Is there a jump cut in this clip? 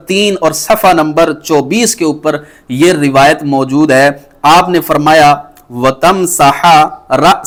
no; 0 cuts

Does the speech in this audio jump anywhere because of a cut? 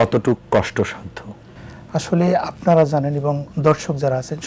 no; 0 cuts

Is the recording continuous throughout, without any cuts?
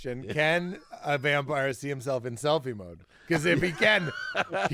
yes; 0 cuts

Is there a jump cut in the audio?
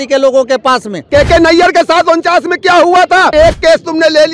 yes; 2 cuts; at 1.0 s, 3.3 s

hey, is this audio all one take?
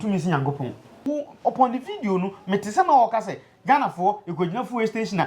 no; 1 cut; at 1.0 s

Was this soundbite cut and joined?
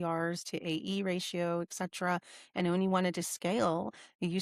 no; 0 cuts

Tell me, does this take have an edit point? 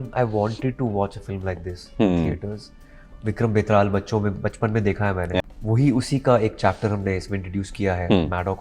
yes; 2 cuts; at 3.1 s, 5.4 s

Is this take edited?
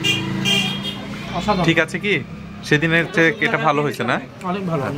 no; 0 cuts

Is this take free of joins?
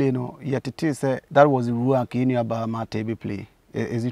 no; 1 cut; at 1.2 s

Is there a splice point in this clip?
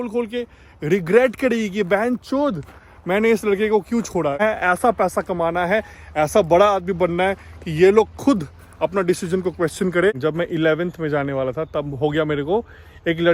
yes; 2 cuts; at 4.4 s, 10.2 s

